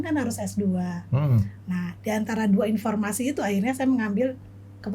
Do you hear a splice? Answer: no; 0 cuts

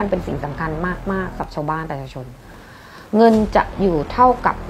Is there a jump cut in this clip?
yes; 1 cut; at 1.5 s

